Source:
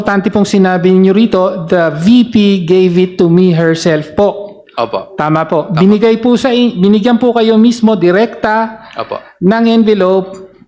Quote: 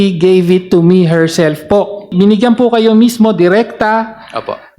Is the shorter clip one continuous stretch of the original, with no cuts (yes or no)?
no